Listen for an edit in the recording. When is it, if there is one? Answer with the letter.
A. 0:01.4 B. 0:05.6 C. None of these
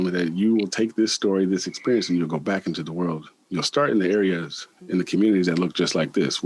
C